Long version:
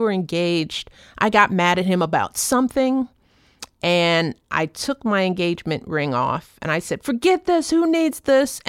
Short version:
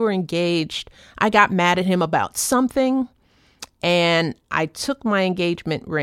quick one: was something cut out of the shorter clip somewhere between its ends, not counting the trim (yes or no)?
no